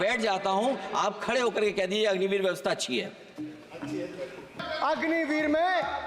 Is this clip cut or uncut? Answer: cut